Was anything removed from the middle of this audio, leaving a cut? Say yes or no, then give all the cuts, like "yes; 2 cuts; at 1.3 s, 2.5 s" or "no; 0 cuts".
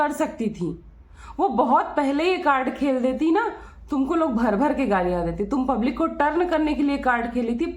no; 0 cuts